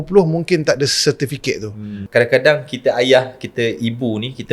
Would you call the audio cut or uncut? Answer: cut